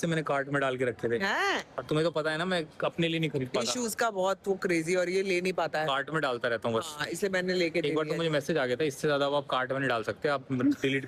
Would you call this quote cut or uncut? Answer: uncut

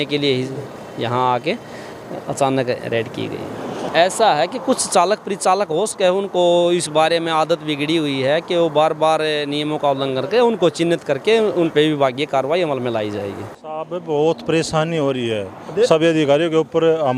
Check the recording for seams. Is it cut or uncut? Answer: cut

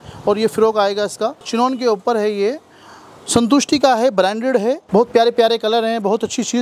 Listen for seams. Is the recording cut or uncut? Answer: cut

